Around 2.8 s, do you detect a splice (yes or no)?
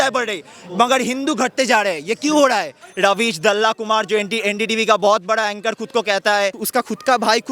yes